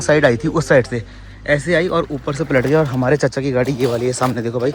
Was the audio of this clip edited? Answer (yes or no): no